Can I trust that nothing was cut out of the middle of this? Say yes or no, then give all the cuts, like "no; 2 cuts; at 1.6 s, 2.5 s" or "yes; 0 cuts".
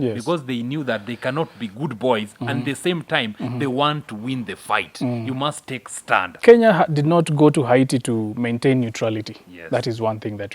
no; 1 cut; at 6.3 s